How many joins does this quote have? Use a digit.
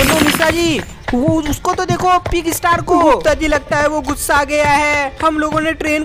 1